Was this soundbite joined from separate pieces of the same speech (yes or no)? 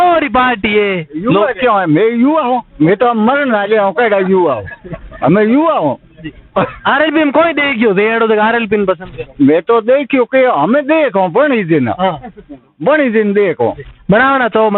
no